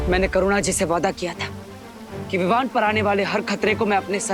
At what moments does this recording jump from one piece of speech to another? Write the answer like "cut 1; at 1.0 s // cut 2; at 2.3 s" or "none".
none